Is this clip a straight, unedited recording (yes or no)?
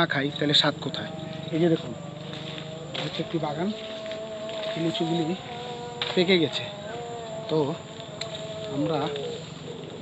yes